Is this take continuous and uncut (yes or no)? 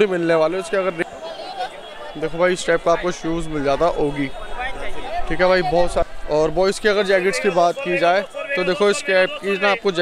no